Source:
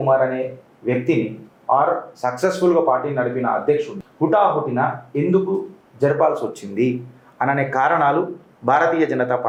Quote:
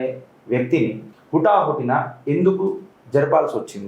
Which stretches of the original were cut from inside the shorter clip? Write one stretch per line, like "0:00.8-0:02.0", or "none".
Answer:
0:01.5-0:04.0